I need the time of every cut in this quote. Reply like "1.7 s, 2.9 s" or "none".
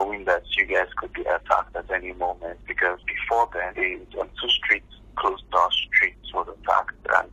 none